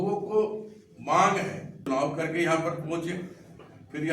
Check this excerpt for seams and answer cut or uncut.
cut